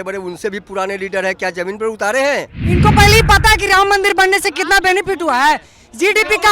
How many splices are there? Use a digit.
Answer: 1